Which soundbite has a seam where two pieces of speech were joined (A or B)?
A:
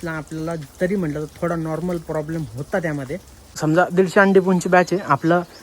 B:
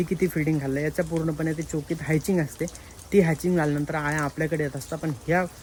A